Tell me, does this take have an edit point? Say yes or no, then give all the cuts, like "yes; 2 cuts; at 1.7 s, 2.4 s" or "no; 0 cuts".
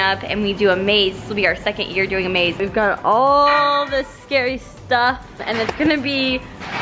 yes; 2 cuts; at 2.6 s, 5.4 s